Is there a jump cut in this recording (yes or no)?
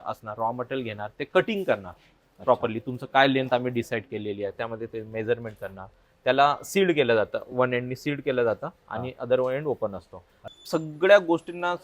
yes